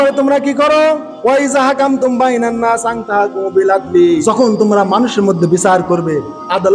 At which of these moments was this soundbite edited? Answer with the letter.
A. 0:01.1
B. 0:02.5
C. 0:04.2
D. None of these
C